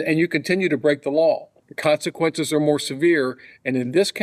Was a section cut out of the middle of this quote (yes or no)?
yes